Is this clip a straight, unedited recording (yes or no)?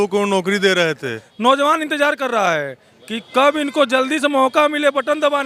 no